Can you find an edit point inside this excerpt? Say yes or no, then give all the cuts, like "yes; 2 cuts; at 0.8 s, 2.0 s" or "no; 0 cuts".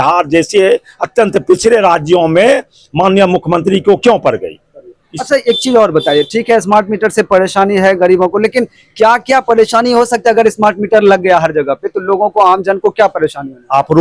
no; 0 cuts